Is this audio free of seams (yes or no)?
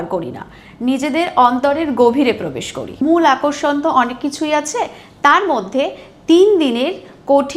no